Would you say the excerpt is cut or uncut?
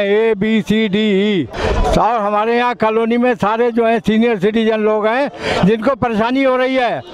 cut